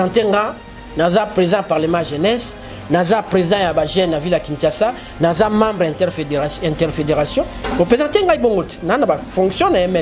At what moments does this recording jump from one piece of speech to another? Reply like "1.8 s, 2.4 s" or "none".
none

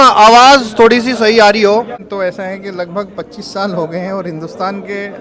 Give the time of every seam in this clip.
2.0 s

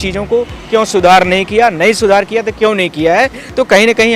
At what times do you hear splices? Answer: none

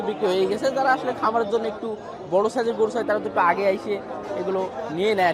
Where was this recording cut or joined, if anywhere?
none

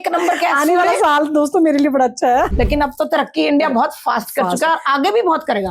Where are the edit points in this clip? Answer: 2.5 s

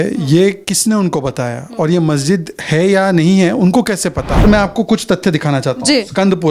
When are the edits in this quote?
4.4 s

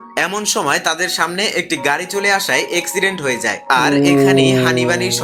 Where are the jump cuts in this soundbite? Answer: none

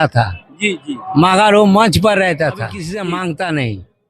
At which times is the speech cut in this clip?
2.8 s

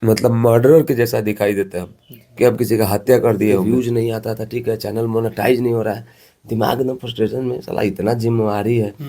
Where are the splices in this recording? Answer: 3.6 s

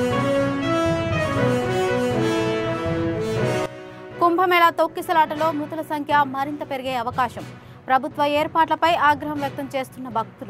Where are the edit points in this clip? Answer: 3.6 s

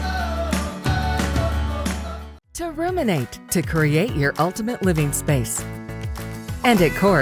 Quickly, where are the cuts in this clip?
2.2 s

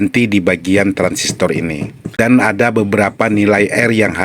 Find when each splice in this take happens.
2.0 s

